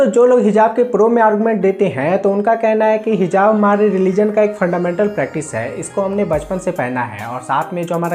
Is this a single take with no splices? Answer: yes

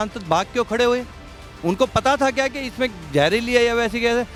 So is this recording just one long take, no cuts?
yes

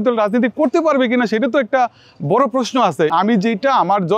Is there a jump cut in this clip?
yes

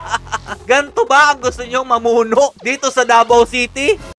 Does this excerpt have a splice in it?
no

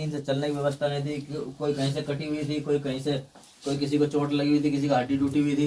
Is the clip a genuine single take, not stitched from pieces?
yes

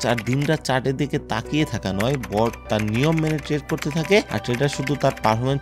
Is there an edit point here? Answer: no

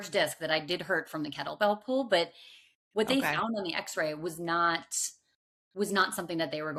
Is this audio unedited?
yes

